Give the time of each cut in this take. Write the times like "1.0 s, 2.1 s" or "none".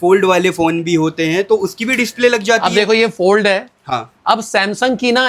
none